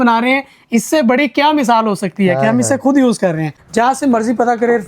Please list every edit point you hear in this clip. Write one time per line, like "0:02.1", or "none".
0:03.6